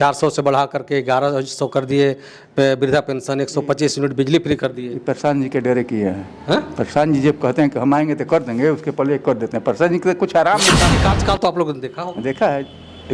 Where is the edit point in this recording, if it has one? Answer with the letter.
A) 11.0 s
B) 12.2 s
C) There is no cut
A